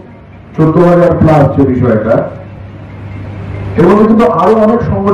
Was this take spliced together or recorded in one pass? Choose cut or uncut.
uncut